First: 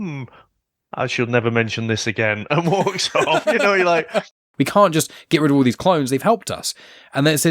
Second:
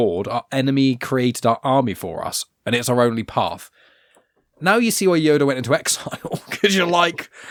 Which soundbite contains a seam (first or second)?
first